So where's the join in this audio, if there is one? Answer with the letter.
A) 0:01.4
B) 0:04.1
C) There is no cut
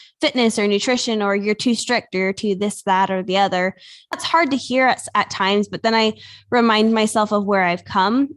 B